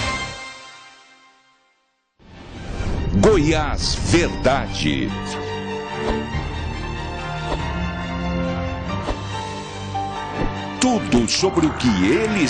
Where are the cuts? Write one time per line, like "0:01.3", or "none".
0:01.9